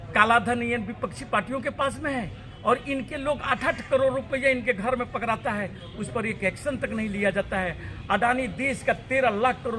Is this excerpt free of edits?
yes; 0 cuts

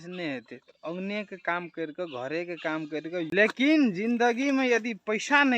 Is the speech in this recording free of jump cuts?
no; 1 cut; at 3.3 s

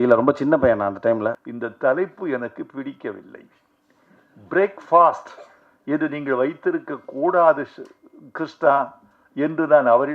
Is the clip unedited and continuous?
no; 1 cut; at 1.4 s

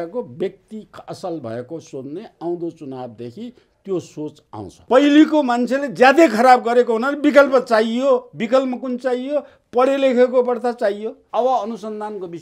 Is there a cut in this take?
yes; 2 cuts; at 4.8 s, 11.2 s

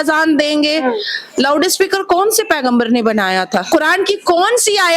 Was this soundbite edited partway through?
yes; 1 cut; at 3.7 s

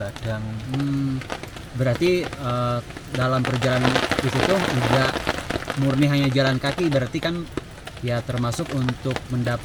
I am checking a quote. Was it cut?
no; 0 cuts

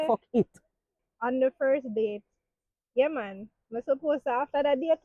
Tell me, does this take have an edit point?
yes; 1 cut; at 1.0 s

